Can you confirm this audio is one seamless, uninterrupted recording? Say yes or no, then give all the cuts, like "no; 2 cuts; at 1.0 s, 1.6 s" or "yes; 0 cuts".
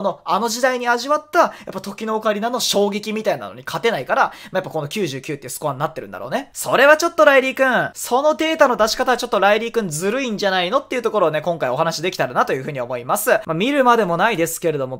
no; 2 cuts; at 6.5 s, 13.4 s